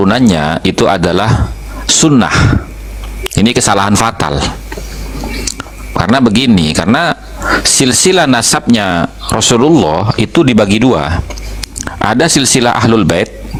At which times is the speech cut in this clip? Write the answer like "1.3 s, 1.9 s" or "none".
none